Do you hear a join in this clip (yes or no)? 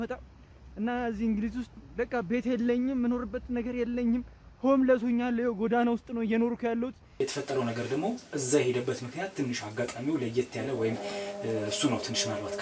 yes